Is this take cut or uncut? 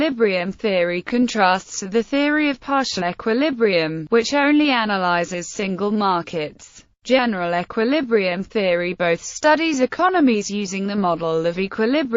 cut